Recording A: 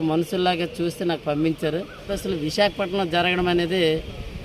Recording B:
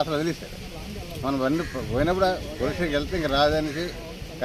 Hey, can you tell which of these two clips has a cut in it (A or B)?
A